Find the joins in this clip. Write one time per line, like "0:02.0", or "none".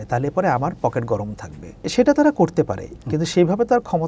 0:01.9